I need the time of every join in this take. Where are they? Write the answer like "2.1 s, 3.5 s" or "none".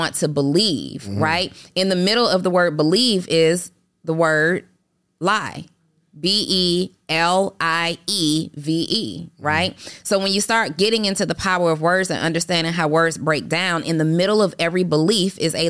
none